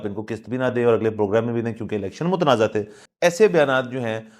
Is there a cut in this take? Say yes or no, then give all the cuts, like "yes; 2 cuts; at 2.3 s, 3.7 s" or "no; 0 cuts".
yes; 1 cut; at 3.0 s